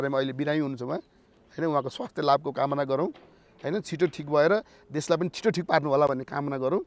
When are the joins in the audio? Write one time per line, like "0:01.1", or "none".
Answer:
none